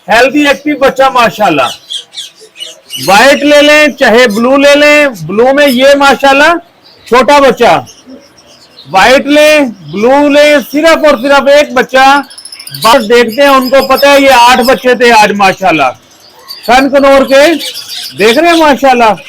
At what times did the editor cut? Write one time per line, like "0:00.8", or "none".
0:12.9